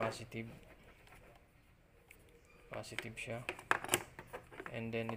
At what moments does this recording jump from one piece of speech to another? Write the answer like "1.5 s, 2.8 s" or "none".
none